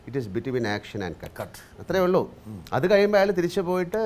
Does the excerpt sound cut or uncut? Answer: uncut